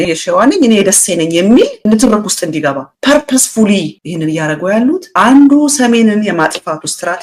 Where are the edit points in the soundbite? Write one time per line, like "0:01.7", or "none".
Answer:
none